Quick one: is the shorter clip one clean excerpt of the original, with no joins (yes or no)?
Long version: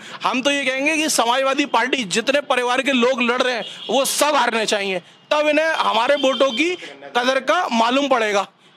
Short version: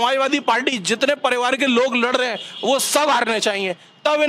yes